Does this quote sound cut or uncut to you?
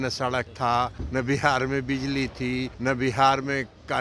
cut